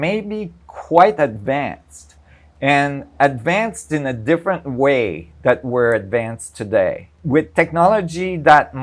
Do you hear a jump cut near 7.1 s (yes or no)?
yes